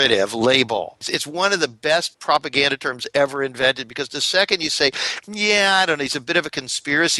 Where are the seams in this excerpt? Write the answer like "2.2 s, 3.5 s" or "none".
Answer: 1.2 s, 2.1 s